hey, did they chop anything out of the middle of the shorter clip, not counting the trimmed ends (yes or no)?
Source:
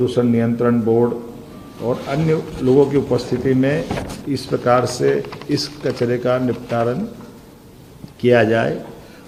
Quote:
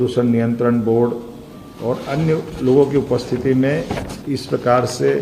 no